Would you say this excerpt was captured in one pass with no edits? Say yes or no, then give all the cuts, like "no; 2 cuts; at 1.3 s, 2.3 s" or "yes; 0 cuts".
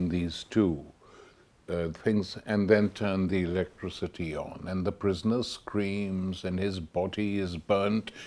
yes; 0 cuts